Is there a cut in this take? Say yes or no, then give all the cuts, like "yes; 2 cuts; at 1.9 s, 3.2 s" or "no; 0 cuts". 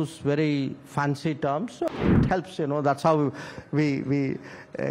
yes; 1 cut; at 2.0 s